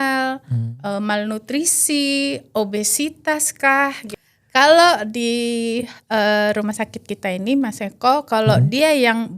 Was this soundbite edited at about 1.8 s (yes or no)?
no